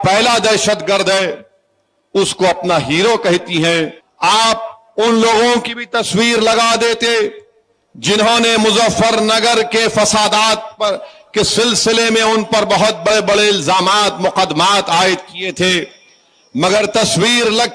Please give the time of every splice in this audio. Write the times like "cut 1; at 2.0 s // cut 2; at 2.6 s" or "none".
cut 1; at 4.0 s

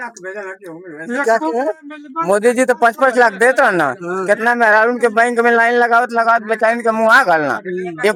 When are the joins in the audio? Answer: none

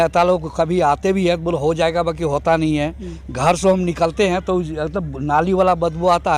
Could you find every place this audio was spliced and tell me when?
none

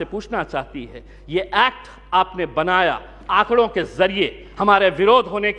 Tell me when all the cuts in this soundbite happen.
none

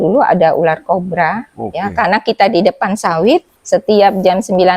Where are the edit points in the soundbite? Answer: cut 1; at 3.6 s

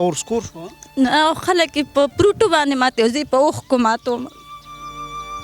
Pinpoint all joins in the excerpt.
cut 1; at 4.5 s

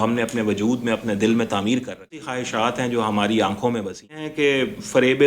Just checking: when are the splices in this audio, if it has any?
cut 1; at 2.4 s // cut 2; at 4.3 s

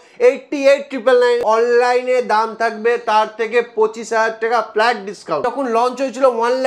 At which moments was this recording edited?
cut 1; at 1.4 s // cut 2; at 5.4 s

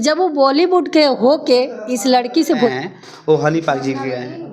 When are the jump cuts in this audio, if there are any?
cut 1; at 2.8 s

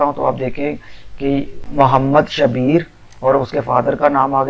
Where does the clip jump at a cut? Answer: cut 1; at 1.6 s

